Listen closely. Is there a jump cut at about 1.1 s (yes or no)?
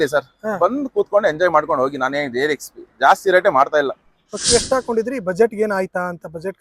no